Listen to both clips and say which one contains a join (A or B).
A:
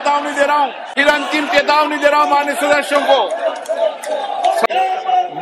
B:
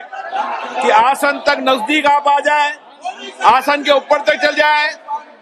A